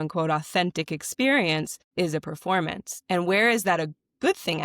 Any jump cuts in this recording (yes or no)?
yes